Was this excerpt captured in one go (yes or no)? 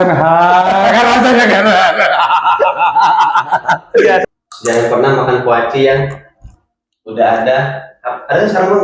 no